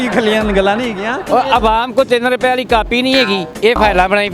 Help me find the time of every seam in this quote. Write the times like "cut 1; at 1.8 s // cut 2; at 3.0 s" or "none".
cut 1; at 1.2 s // cut 2; at 3.5 s

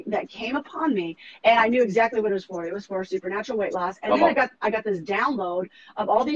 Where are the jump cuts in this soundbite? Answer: none

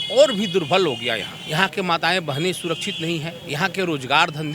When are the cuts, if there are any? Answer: cut 1; at 1.3 s // cut 2; at 3.4 s

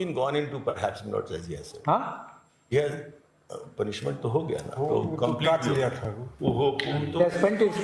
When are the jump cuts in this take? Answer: none

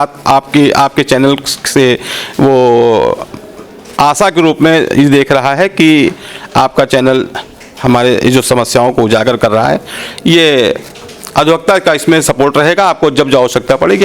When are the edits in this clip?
none

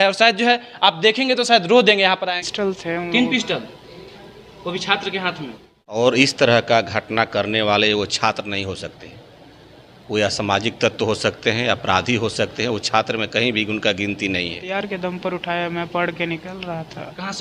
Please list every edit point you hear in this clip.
cut 1; at 2.3 s // cut 2; at 5.8 s // cut 3; at 14.6 s

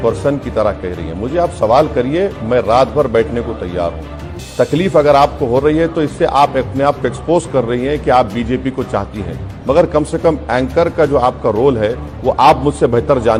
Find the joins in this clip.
none

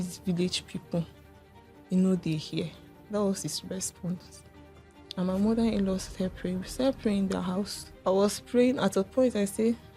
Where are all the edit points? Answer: cut 1; at 7.8 s

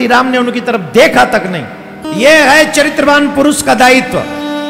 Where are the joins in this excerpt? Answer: cut 1; at 2.0 s

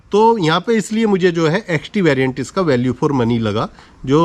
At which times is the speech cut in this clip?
none

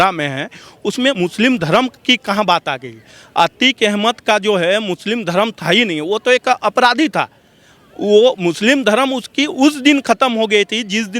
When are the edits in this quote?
cut 1; at 1.1 s

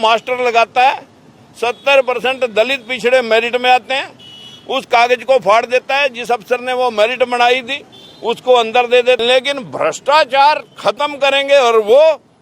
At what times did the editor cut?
cut 1; at 9.2 s

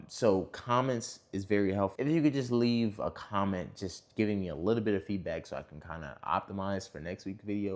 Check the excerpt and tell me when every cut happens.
cut 1; at 1.9 s

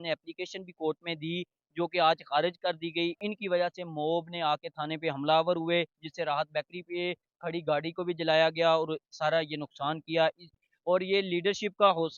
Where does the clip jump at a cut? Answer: cut 1; at 3.2 s // cut 2; at 10.6 s

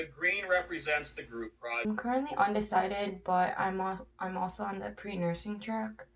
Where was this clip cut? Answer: cut 1; at 1.8 s

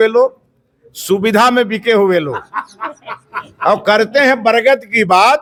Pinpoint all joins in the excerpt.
none

